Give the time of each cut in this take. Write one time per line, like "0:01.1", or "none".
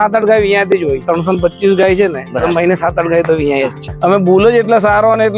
0:01.0
0:03.8